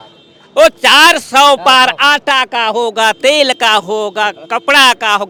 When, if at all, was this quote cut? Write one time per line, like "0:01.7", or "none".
none